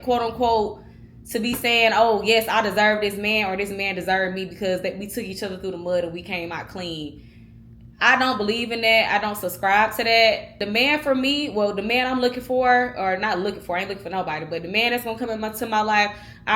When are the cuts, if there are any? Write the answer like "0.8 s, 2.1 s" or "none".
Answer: 10.6 s